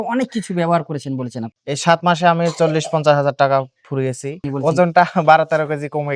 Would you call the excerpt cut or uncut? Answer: cut